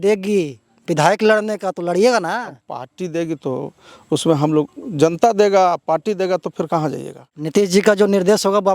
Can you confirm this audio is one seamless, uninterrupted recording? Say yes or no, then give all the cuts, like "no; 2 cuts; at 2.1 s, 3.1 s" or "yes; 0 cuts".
no; 1 cut; at 7.5 s